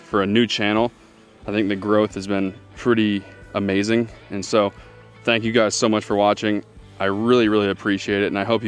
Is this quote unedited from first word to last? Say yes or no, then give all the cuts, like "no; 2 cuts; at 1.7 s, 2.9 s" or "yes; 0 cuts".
yes; 0 cuts